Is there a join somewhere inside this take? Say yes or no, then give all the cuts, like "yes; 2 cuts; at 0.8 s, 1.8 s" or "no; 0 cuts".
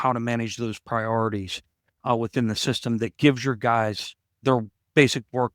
no; 0 cuts